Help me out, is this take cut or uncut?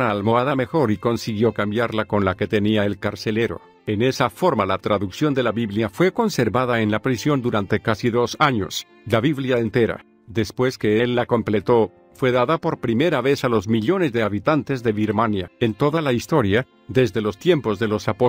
cut